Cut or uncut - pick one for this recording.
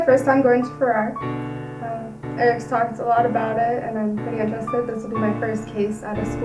uncut